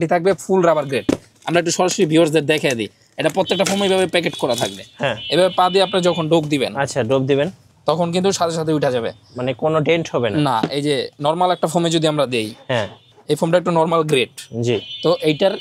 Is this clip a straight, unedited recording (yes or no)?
yes